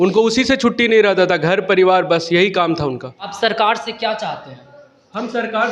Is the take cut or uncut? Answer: cut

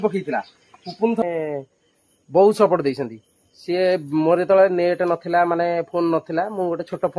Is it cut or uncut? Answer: cut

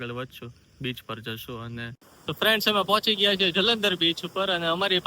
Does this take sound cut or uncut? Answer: cut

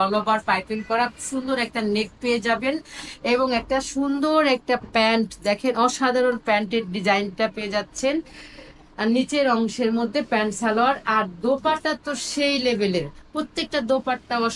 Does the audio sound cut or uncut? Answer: uncut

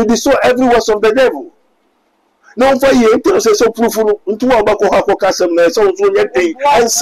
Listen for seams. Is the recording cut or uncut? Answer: uncut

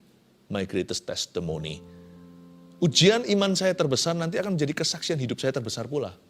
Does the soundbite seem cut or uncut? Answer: uncut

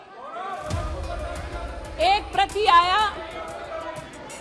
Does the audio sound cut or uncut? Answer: uncut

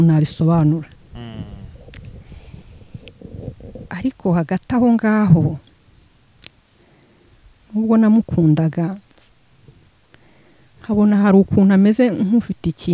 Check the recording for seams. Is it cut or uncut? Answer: uncut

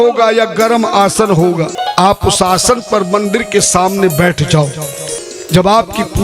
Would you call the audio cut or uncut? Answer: cut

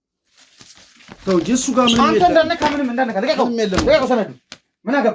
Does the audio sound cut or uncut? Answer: uncut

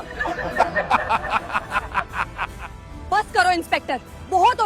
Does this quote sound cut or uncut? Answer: cut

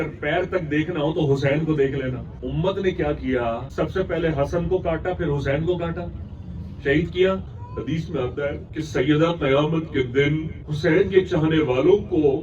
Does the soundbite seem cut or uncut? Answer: cut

